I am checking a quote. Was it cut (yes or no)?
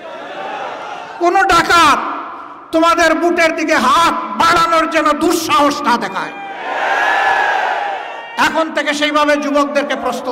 no